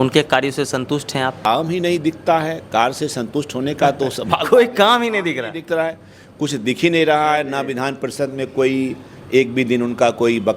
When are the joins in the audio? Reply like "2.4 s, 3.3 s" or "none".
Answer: 1.4 s